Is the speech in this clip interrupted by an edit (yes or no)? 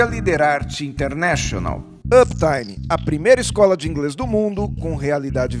no